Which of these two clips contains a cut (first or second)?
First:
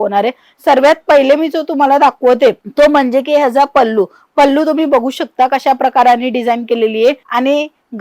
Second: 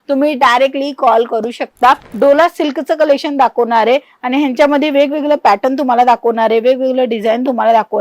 second